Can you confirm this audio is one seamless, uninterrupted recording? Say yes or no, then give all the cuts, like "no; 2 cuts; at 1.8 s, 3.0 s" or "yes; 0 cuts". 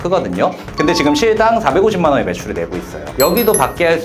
no; 1 cut; at 3.1 s